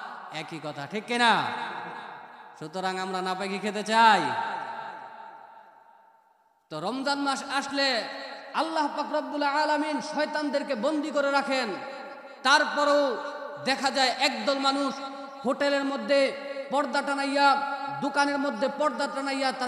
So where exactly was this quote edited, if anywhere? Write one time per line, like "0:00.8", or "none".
none